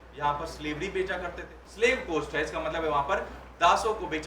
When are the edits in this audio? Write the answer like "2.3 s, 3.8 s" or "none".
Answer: 1.6 s